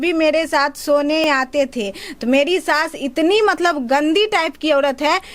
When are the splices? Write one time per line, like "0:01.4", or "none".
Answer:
0:01.2